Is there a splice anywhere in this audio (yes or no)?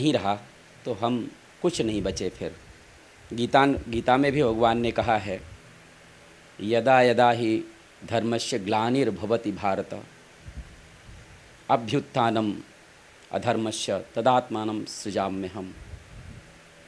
no